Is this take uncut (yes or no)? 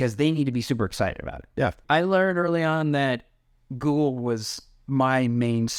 no